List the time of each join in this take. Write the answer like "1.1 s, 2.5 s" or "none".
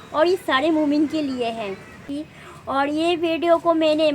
2.0 s